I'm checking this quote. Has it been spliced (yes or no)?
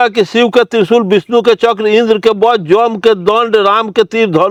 no